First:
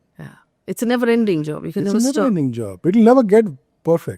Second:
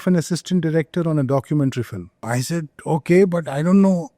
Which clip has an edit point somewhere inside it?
second; 1 cut; at 2.3 s

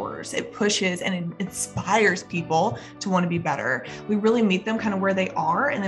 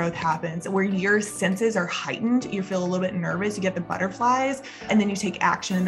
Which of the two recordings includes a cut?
second; 1 cut; at 4.7 s

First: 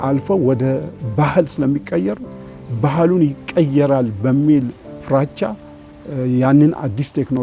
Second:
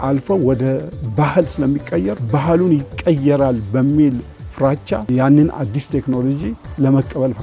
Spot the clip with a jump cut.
second; 2 cuts; at 2.2 s, 5.1 s

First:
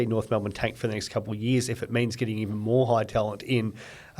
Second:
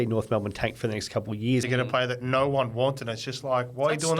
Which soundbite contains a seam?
second; 1 cut; at 1.6 s

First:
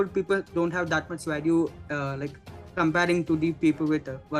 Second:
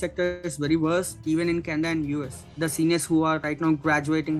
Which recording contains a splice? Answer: second; 3 cuts; at 1.1 s, 2.5 s, 3.5 s

